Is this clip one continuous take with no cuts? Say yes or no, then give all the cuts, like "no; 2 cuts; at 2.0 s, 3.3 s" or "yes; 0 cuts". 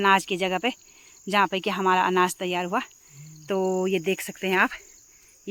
yes; 0 cuts